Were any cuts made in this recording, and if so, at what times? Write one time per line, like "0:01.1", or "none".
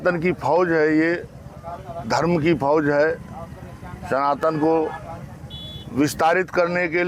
none